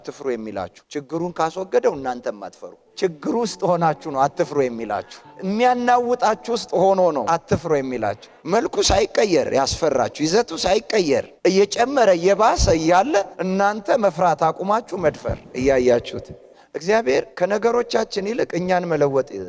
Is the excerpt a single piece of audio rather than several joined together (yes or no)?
yes